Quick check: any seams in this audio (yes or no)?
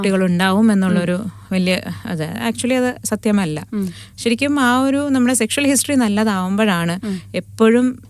no